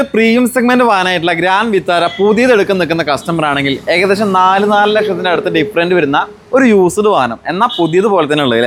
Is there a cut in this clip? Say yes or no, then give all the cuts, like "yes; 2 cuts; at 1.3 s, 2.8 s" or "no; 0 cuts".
no; 0 cuts